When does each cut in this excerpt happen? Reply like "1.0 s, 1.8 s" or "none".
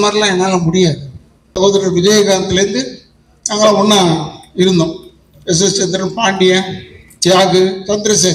1.6 s

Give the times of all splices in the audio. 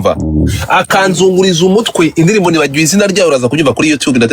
none

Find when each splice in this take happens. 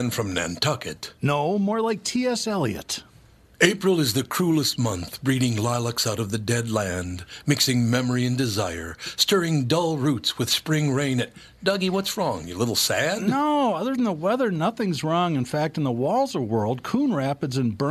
none

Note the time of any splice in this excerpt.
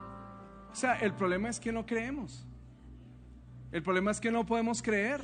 none

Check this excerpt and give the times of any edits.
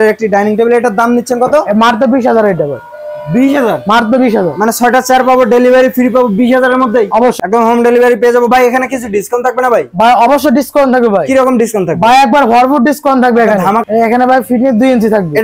7.4 s, 13.8 s

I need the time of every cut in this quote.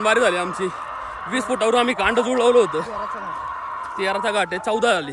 none

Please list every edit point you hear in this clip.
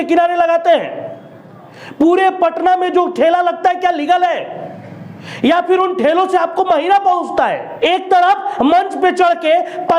7.6 s

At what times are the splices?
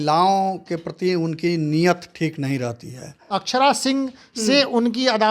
3.2 s

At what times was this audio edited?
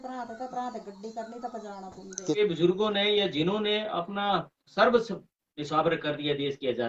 2.4 s

